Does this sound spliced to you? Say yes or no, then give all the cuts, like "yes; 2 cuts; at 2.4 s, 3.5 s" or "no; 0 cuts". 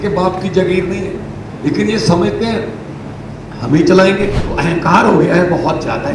yes; 1 cut; at 4.4 s